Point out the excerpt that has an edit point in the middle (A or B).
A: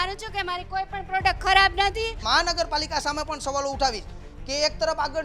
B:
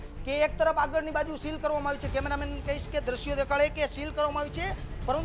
A